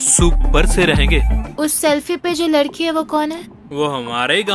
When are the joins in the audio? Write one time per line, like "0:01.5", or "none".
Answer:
0:01.5